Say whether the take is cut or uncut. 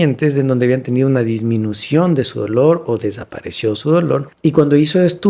cut